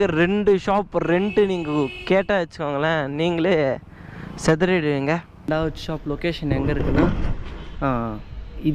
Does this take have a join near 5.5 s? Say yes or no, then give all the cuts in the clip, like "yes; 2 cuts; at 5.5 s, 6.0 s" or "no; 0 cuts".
yes; 1 cut; at 5.5 s